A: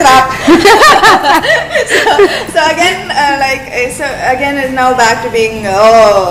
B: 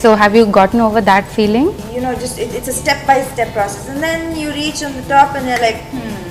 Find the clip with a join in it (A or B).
B